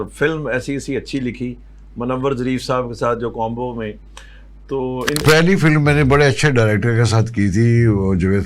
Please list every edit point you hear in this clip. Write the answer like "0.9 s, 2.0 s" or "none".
5.2 s